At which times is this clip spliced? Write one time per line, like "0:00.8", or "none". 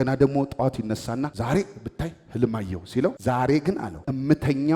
0:01.3
0:03.2
0:04.0